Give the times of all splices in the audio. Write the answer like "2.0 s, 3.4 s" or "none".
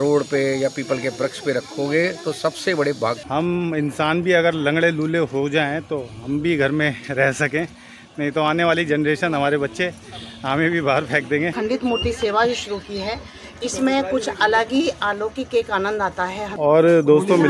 3.2 s, 11.5 s, 16.5 s